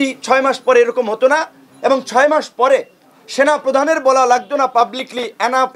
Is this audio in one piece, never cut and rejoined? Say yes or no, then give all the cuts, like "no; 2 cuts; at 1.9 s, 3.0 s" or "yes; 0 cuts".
yes; 0 cuts